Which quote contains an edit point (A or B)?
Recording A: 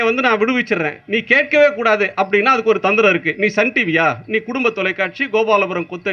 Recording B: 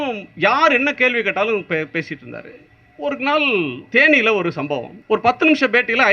B